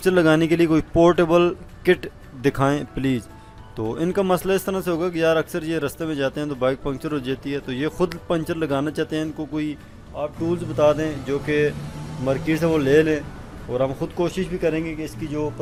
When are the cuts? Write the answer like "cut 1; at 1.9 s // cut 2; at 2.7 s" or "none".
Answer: none